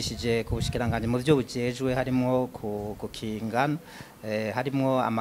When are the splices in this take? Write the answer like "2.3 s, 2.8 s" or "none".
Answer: none